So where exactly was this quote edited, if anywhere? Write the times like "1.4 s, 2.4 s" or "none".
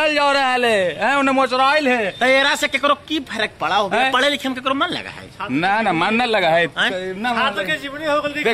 none